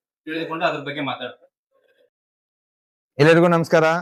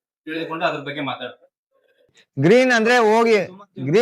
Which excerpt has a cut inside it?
second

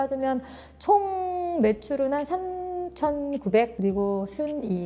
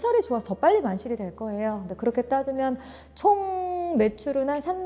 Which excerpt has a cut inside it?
first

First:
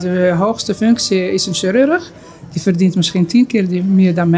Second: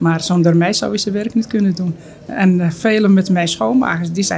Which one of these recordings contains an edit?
second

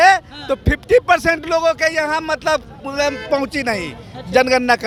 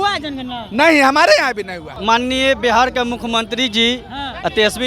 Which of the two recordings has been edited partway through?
second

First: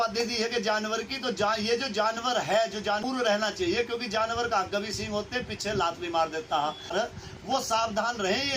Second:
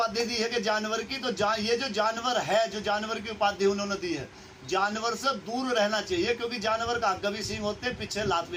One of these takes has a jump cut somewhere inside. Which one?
first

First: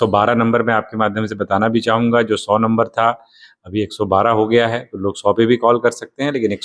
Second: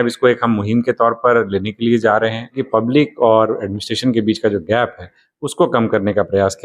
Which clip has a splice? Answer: second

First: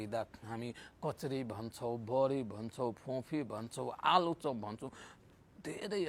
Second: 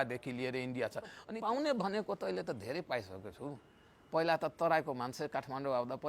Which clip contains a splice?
second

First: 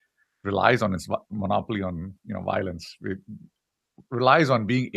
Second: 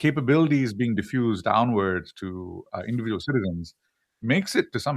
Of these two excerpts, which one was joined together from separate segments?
first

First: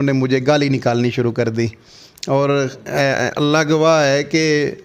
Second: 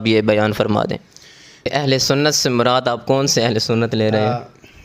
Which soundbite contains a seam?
second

